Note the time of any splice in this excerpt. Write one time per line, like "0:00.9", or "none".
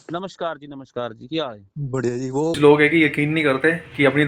0:02.6